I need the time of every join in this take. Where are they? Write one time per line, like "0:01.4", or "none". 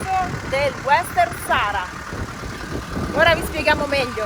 none

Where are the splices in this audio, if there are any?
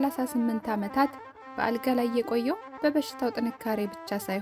none

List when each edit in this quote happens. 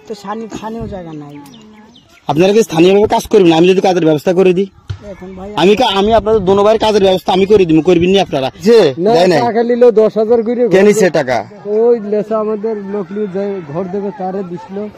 0:08.6

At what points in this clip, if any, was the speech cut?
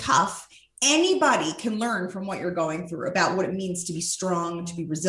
none

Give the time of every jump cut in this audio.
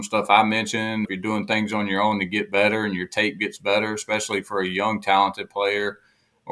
0:01.1

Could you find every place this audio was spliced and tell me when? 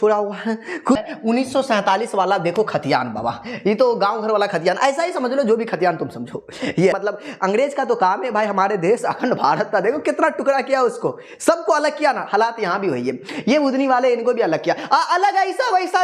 0:01.0
0:06.9

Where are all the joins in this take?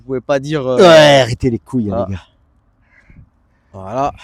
none

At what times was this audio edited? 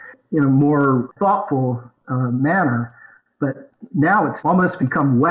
0:01.1
0:04.4

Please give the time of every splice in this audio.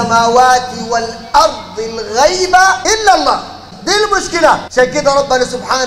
0:02.8
0:03.7
0:04.7

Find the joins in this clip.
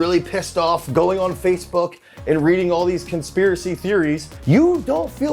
0:04.3

